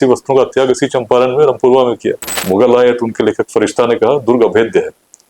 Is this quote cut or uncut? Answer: cut